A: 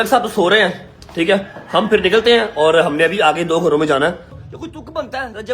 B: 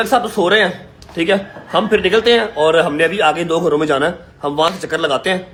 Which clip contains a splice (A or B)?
A